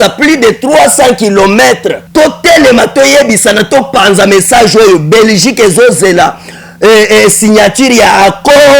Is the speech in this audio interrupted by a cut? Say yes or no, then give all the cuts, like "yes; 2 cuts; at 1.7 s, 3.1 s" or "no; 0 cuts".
yes; 1 cut; at 2.0 s